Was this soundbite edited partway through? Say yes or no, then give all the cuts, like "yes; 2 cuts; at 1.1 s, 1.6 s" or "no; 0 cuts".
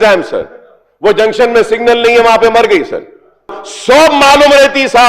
yes; 1 cut; at 3.7 s